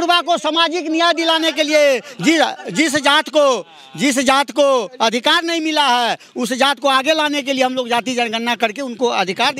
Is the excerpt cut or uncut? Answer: uncut